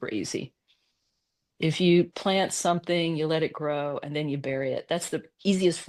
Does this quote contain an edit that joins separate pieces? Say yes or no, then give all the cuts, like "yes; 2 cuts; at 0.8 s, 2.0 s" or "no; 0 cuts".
no; 0 cuts